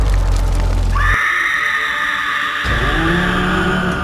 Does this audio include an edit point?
no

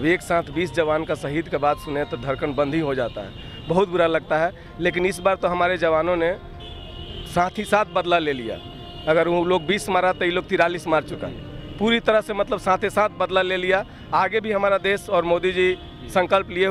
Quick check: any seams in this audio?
no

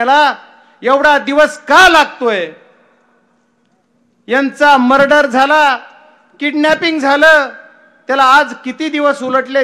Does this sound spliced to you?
no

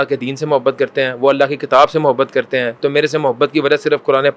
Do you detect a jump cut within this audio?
no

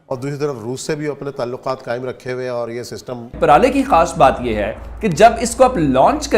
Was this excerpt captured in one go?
no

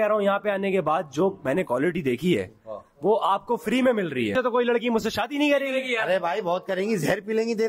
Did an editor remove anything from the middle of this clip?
yes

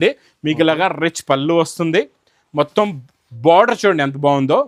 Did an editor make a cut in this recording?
no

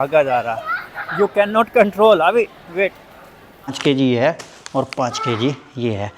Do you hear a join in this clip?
yes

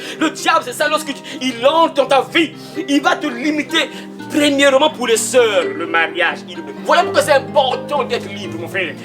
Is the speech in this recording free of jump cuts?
no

